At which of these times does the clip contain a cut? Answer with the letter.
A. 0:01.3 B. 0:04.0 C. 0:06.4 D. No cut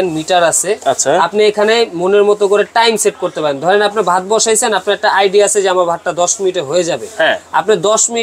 D